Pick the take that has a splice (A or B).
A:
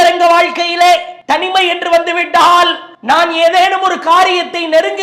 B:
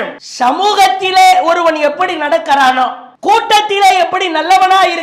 A